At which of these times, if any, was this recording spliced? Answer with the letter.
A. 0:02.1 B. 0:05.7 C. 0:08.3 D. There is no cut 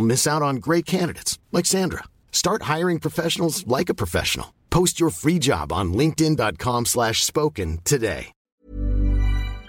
C